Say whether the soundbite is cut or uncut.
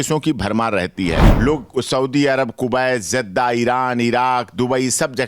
cut